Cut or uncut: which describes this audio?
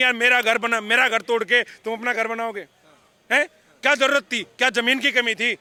uncut